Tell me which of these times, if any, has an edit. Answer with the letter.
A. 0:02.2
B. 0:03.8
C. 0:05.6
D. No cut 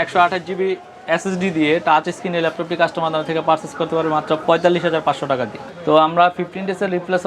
C